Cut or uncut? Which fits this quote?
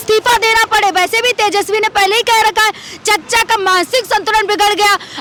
uncut